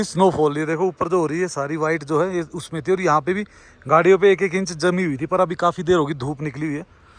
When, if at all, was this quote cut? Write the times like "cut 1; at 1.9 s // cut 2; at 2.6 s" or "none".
none